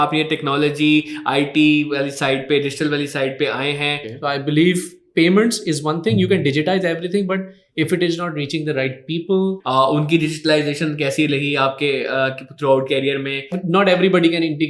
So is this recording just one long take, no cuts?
no; 3 cuts; at 4.1 s, 9.6 s, 13.6 s

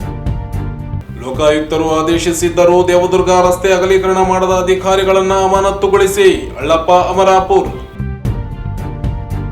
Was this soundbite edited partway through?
yes; 1 cut; at 1.0 s

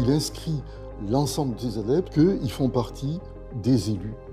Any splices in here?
yes; 1 cut; at 2.1 s

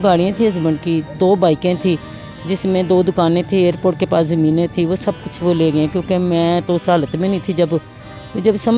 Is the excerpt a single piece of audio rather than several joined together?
yes; 0 cuts

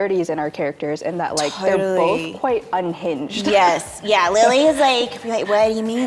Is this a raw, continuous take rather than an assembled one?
yes; 0 cuts

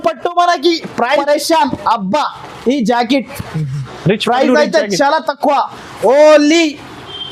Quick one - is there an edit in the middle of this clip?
yes; 1 cut; at 1.2 s

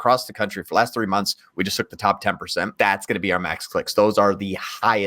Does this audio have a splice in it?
yes; 1 cut; at 2.7 s

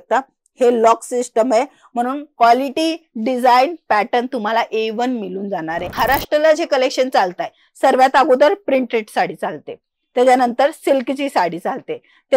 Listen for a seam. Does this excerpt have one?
yes; 1 cut; at 5.9 s

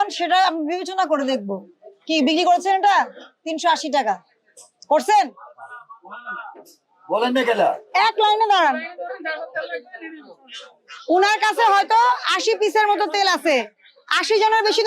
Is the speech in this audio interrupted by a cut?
yes; 1 cut; at 7.8 s

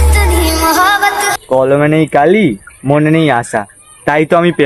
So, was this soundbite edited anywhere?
yes; 1 cut; at 1.3 s

